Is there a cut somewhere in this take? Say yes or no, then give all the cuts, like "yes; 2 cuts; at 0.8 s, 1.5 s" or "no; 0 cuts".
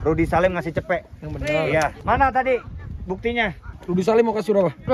yes; 2 cuts; at 2.0 s, 3.7 s